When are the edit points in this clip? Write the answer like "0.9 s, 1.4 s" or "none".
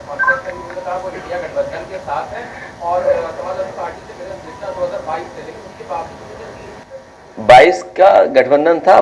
6.8 s